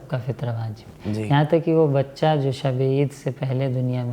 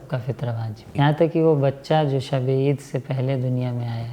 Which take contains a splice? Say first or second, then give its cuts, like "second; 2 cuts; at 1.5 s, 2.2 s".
second; 1 cut; at 0.9 s